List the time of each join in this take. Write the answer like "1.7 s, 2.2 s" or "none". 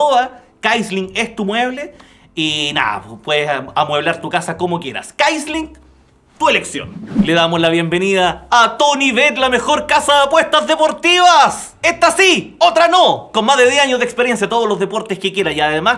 7.2 s